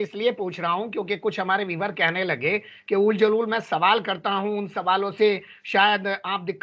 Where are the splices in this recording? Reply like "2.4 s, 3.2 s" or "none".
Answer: none